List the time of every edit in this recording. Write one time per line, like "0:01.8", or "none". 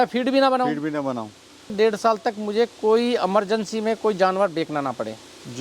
0:01.7